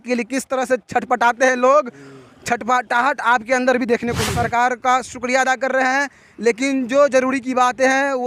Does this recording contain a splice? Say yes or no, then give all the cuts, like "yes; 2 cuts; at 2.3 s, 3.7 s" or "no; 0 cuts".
yes; 1 cut; at 4.3 s